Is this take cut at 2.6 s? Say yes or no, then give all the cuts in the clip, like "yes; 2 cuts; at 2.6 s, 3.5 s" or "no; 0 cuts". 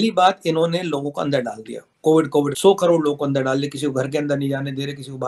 no; 0 cuts